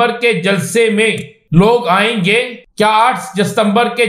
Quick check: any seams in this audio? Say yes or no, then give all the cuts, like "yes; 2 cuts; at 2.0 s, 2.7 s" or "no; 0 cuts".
yes; 2 cuts; at 1.3 s, 2.6 s